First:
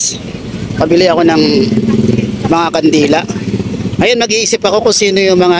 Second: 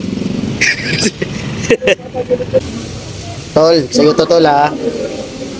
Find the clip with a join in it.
second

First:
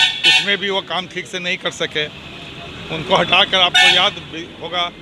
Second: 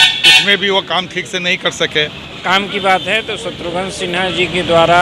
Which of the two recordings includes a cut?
second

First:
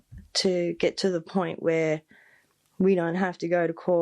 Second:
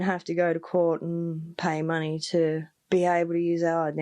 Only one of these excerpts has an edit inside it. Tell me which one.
second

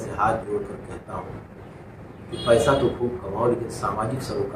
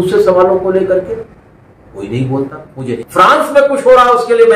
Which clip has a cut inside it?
second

